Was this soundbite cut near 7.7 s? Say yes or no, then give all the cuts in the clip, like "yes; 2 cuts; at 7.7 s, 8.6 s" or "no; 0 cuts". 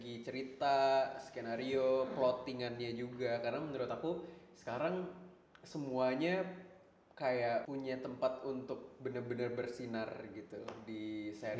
yes; 1 cut; at 7.7 s